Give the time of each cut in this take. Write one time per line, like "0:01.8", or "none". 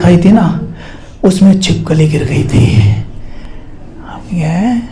none